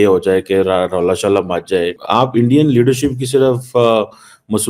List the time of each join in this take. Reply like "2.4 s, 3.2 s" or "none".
2.0 s